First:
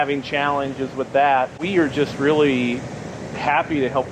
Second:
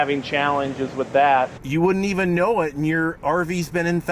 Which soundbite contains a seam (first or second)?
second